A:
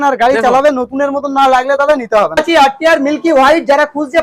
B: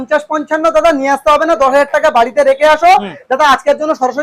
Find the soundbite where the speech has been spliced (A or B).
A